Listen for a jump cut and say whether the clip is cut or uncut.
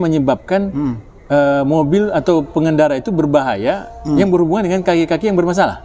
uncut